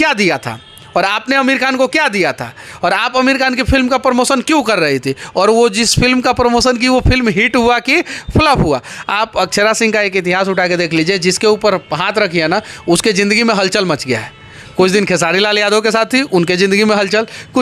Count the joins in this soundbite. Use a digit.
0